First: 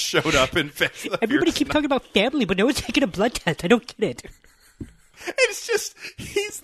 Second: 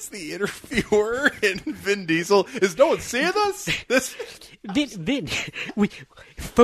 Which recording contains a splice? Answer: first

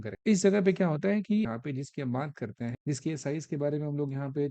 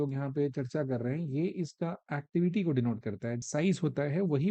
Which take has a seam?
first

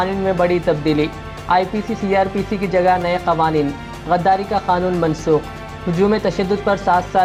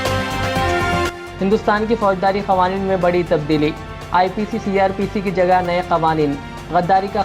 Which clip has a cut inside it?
second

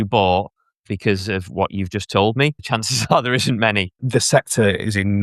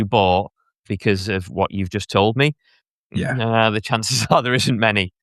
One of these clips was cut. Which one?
first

